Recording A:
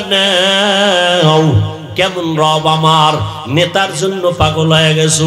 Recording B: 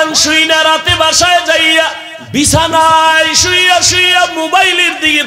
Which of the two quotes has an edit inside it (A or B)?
B